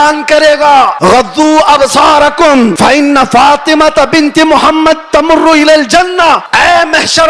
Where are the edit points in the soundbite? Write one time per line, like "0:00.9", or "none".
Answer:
0:00.9
0:02.7
0:06.5